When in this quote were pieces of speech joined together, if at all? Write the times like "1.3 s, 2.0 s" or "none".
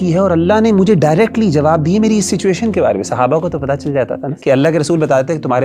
4.3 s